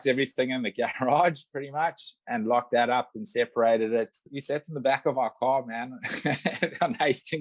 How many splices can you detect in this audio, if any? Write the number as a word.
one